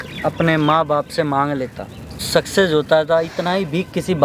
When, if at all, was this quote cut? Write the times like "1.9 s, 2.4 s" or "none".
2.3 s